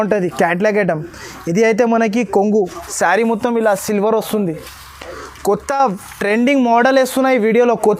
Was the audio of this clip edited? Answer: no; 0 cuts

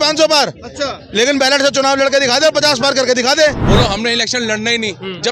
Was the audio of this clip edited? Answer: yes; 1 cut; at 3.6 s

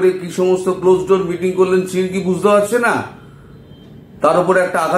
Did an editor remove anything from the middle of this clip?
no; 0 cuts

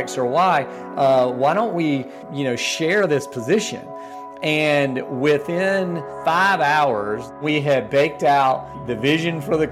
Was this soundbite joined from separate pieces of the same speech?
yes; 4 cuts; at 2.2 s, 6.1 s, 7.4 s, 8.8 s

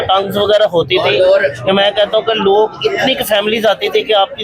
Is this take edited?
no; 0 cuts

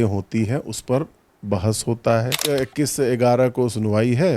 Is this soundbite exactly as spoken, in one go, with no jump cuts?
no; 1 cut; at 2.4 s

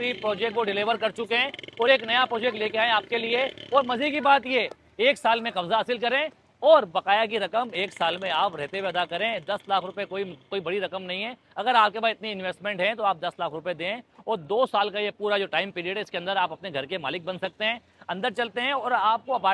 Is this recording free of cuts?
yes; 0 cuts

